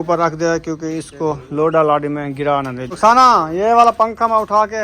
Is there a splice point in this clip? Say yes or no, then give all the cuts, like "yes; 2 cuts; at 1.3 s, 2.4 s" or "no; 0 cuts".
yes; 1 cut; at 2.8 s